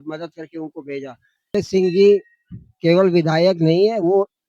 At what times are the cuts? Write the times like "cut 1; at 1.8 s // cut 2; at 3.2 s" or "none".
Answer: cut 1; at 1.6 s